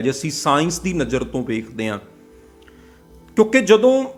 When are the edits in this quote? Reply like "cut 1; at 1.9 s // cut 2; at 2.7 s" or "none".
none